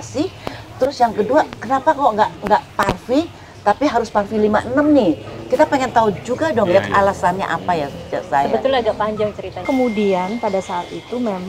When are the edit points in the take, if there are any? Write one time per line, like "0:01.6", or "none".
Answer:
0:09.6